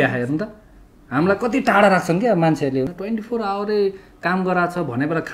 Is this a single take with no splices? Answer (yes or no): no